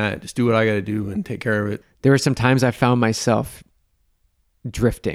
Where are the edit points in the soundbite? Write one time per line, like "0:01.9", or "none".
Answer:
0:01.8